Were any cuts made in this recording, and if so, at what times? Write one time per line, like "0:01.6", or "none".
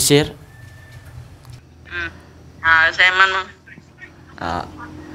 0:01.5